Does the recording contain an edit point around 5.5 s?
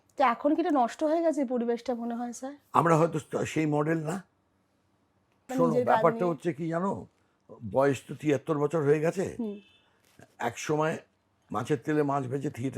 yes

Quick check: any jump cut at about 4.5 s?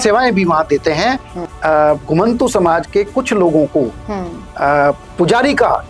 no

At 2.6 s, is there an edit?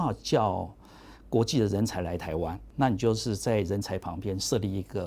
yes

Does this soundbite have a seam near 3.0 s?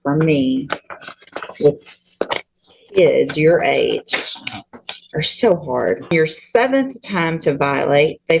no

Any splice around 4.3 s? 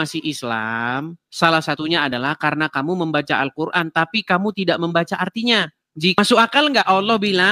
no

